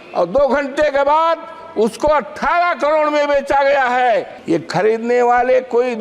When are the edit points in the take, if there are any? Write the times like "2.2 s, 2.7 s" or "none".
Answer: 4.3 s